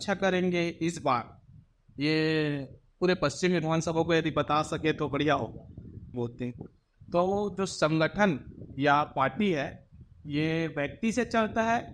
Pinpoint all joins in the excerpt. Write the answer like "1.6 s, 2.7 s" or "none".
6.1 s